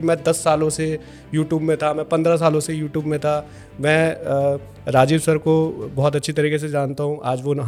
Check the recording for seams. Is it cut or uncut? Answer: uncut